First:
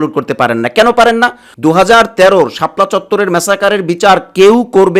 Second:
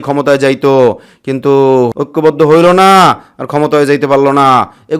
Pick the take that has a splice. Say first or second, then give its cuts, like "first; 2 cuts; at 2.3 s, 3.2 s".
first; 1 cut; at 1.4 s